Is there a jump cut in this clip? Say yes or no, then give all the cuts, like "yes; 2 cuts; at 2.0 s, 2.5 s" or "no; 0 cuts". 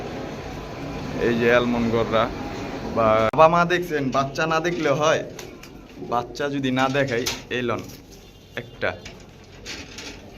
yes; 1 cut; at 3.4 s